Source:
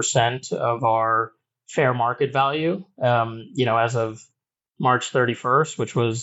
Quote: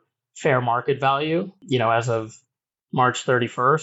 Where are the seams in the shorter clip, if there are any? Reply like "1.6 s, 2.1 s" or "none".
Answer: 1.5 s